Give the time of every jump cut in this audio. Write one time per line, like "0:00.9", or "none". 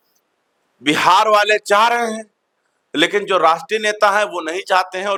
none